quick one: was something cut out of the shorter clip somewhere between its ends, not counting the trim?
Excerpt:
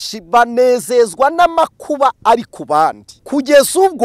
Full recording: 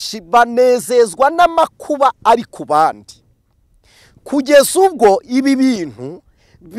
yes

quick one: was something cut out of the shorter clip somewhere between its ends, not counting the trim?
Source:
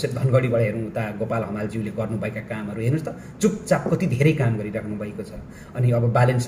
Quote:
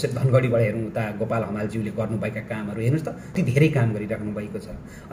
yes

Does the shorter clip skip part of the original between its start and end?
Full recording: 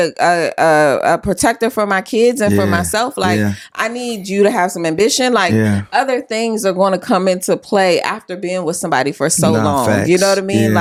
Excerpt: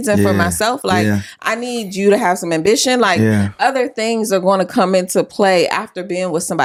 no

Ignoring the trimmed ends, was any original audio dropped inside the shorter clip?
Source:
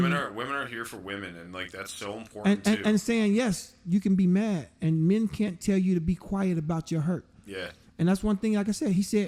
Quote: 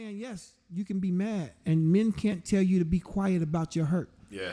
no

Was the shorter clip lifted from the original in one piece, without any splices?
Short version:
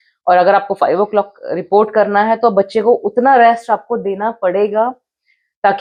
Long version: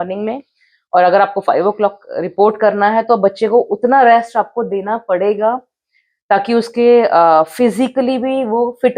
yes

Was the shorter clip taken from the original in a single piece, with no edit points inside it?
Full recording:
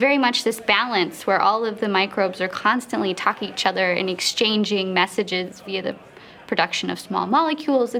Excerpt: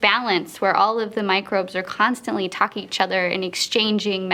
yes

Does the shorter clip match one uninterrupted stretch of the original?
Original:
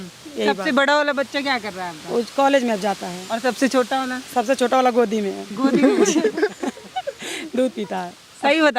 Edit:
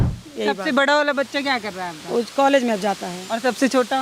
yes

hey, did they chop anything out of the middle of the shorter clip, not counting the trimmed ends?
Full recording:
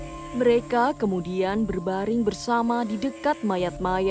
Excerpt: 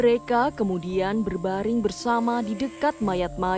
no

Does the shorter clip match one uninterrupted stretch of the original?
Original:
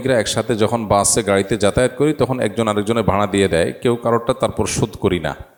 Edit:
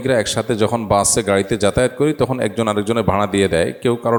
yes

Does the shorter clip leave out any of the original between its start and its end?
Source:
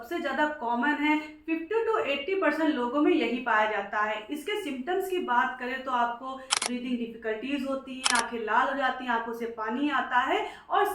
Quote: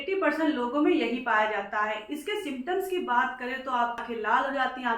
yes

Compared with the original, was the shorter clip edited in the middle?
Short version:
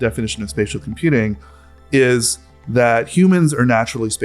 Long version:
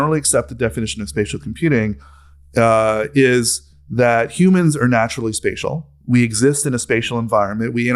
yes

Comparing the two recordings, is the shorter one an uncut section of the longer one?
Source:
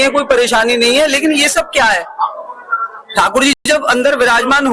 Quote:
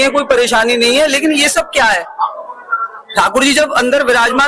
no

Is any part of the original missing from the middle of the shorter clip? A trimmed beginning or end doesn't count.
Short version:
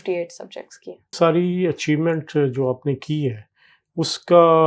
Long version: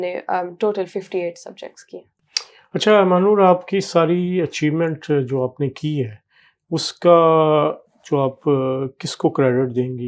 yes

